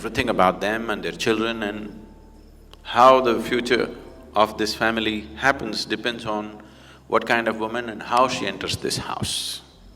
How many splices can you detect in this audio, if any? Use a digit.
0